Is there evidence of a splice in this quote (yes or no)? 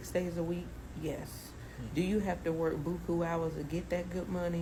no